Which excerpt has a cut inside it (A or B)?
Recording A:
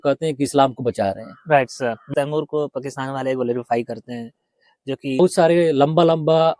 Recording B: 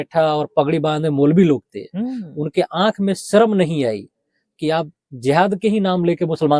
A